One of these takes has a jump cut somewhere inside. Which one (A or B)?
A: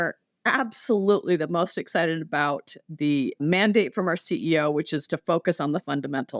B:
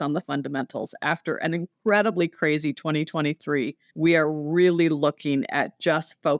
B